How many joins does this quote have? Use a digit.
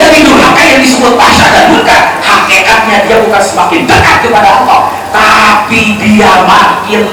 0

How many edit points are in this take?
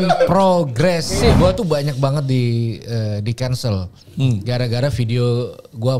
1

